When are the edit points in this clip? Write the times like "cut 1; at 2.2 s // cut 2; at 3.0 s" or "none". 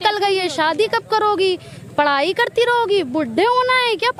none